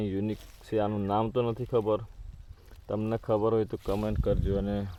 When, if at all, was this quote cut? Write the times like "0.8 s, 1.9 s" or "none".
none